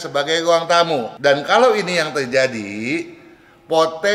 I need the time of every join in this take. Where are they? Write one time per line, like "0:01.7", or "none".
0:01.1